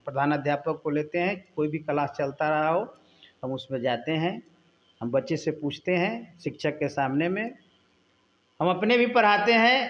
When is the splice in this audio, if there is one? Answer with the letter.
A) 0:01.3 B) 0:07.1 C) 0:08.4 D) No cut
D